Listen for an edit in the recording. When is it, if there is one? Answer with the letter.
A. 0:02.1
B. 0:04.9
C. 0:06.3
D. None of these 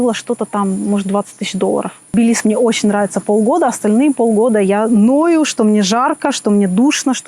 A